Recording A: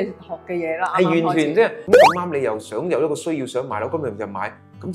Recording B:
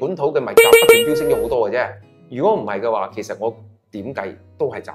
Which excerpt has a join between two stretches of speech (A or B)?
A